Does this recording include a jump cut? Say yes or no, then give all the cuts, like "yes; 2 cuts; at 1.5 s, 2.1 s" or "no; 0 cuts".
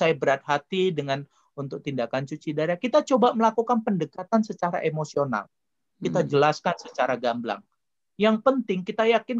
no; 0 cuts